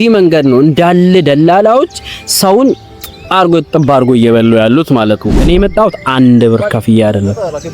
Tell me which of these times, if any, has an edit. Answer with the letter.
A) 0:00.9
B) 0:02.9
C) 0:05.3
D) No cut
C